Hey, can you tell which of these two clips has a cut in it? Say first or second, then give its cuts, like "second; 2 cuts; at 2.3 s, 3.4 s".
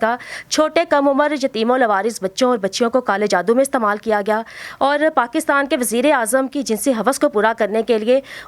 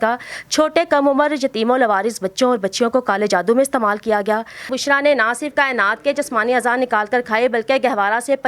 second; 1 cut; at 4.7 s